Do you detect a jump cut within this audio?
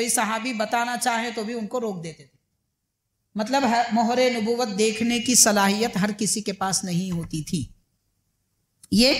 no; 0 cuts

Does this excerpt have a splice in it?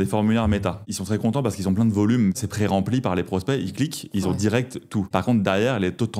yes; 3 cuts; at 0.9 s, 2.4 s, 5.1 s

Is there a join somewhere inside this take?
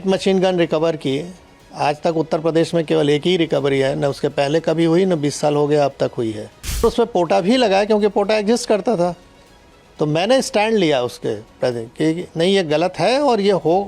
yes; 1 cut; at 6.8 s

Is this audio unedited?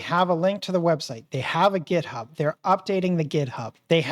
yes; 0 cuts

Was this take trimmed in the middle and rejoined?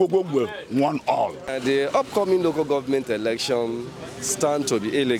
yes; 1 cut; at 1.5 s

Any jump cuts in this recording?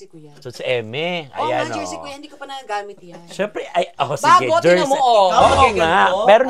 no; 0 cuts

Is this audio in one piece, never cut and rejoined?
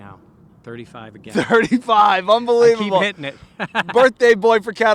yes; 0 cuts

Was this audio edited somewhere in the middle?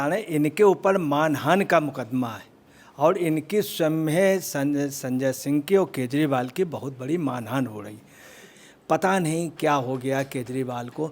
yes; 1 cut; at 8.7 s

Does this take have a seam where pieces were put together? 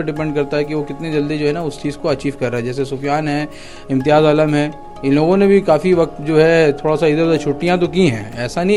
no; 0 cuts

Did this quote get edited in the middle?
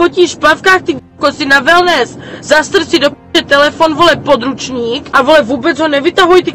no; 0 cuts

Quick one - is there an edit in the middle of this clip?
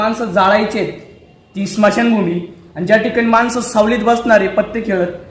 no; 0 cuts

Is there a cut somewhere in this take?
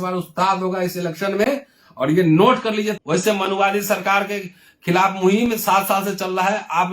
yes; 1 cut; at 3.0 s

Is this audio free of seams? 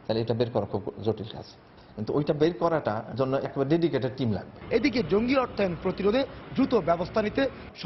yes; 0 cuts

